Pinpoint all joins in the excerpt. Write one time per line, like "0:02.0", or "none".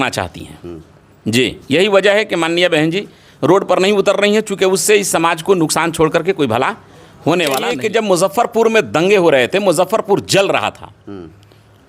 0:07.7